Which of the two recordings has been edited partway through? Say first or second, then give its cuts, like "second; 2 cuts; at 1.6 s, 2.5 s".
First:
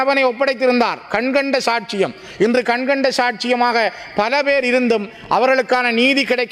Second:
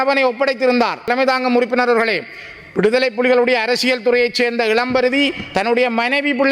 second; 1 cut; at 1.1 s